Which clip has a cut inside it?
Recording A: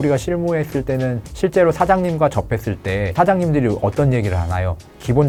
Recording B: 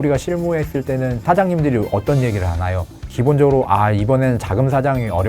B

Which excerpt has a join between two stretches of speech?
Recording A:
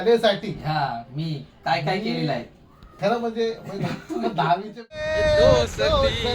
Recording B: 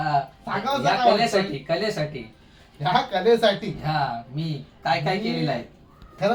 A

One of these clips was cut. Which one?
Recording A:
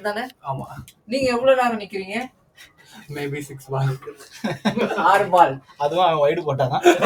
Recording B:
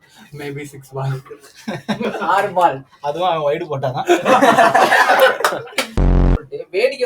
B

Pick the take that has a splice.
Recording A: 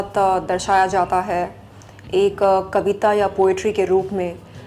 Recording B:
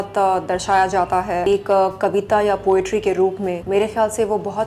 B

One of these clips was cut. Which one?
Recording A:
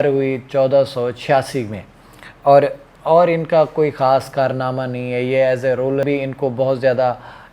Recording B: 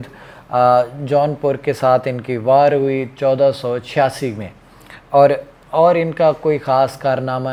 A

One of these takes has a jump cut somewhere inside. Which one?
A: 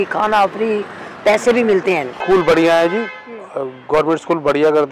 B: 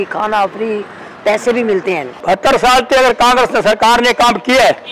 B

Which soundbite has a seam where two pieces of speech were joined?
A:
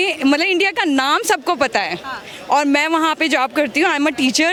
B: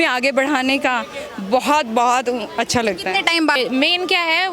B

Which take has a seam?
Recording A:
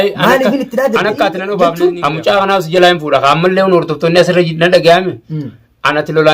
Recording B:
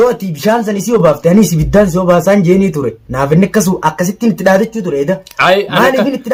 A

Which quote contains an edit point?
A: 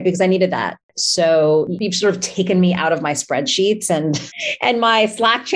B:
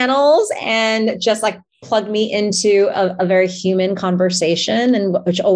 A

